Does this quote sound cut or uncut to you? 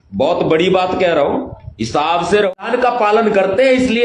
cut